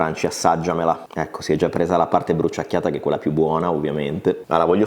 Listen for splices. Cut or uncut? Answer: cut